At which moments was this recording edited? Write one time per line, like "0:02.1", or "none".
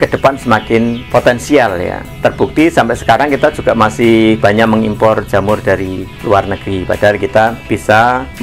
0:06.1
0:07.6